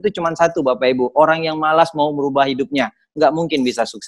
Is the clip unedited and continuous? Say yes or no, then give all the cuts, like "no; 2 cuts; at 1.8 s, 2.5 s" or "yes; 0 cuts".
yes; 0 cuts